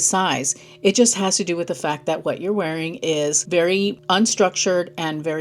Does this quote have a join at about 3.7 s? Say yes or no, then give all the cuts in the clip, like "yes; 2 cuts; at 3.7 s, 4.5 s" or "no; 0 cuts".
yes; 1 cut; at 3.7 s